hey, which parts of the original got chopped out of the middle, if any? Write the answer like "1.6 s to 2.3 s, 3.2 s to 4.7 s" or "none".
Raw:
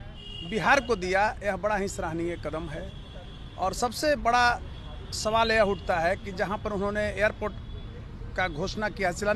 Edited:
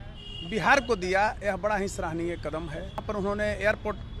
3.0 s to 6.6 s